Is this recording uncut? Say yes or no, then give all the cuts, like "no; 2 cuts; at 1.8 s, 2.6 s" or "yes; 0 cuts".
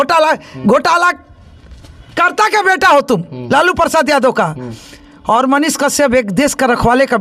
yes; 0 cuts